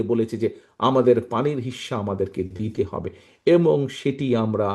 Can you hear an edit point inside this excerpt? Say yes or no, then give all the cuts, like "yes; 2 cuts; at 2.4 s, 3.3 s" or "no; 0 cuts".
no; 0 cuts